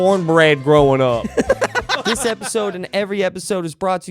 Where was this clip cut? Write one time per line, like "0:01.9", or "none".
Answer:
0:01.9